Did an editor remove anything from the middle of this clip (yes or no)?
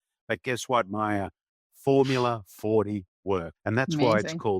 yes